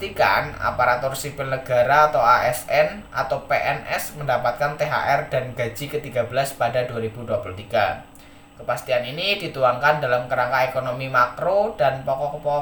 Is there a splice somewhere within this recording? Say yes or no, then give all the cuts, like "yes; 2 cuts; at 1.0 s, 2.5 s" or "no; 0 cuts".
no; 0 cuts